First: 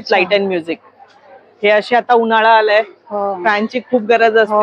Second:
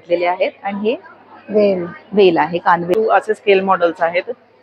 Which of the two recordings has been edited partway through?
second; 1 cut; at 2.9 s

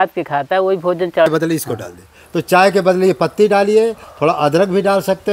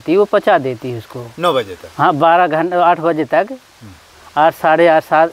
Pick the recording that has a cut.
first; 1 cut; at 1.3 s

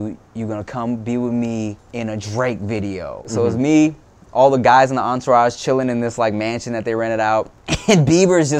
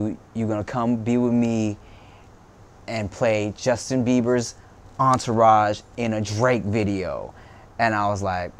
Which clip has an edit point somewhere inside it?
first; 3 cuts; at 1.8 s, 3.3 s, 7.6 s

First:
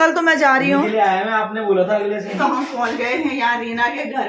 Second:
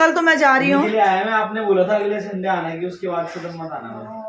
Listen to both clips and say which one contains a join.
first; 1 cut; at 2.4 s

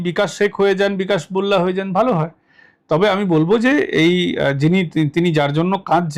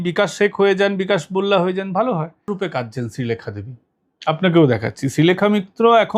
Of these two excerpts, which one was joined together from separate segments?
second; 1 cut; at 2.5 s

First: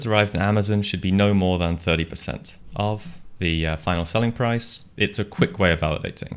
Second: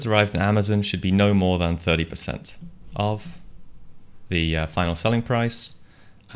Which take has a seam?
first; 3 cuts; at 2.5 s, 3.2 s, 4.8 s

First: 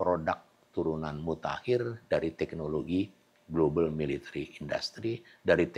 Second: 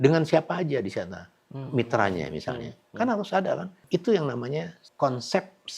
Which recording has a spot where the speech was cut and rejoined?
second; 2 cuts; at 3.7 s, 4.8 s

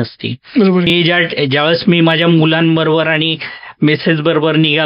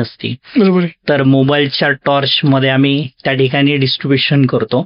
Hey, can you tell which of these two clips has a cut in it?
first; 1 cut; at 0.9 s

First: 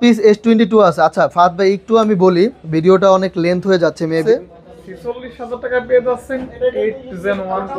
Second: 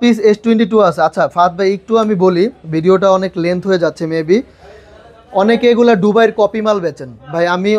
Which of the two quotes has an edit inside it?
first; 1 cut; at 4.2 s

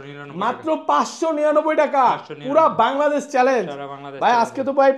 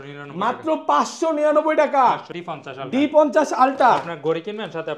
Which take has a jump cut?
second; 1 cut; at 2.3 s

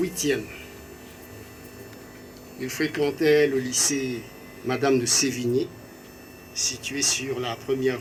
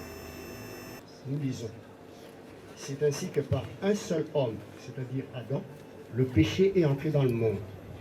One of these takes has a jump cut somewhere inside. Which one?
second; 1 cut; at 1.0 s

